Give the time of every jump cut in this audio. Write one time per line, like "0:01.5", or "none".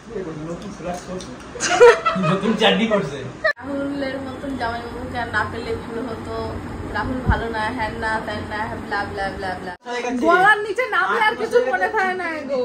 0:03.6
0:09.9